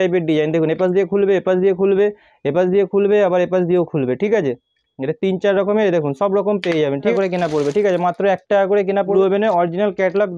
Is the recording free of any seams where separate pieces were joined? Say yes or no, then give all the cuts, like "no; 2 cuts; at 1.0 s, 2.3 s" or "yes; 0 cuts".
no; 2 cuts; at 7.1 s, 9.1 s